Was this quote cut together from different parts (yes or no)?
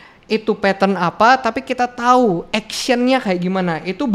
no